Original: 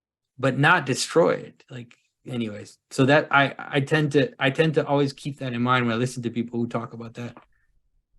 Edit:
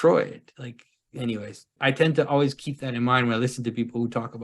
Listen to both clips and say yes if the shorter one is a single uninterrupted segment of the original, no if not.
no